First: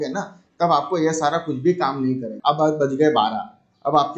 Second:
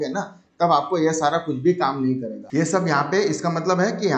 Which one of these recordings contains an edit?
first; 1 cut; at 2.3 s

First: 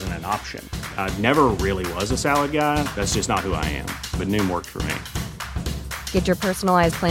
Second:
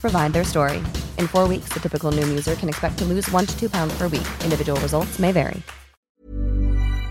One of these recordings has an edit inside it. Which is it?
second; 1 cut; at 6.1 s

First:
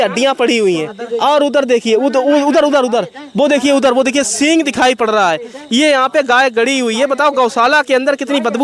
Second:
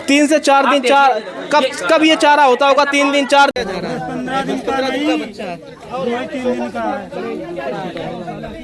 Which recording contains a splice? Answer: second; 1 cut; at 3.5 s

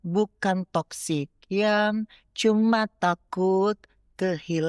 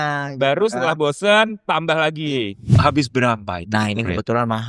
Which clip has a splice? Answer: second; 1 cut; at 2.8 s

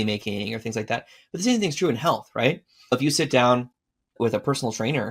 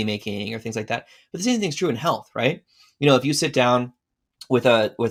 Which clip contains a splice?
first; 2 cuts; at 2.9 s, 4.1 s

